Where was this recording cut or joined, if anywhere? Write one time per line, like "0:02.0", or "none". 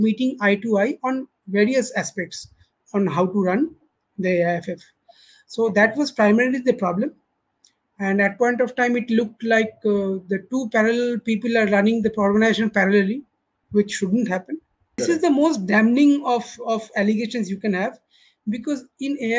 0:15.0